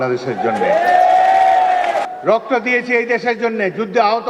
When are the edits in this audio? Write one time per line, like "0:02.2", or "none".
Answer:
0:02.1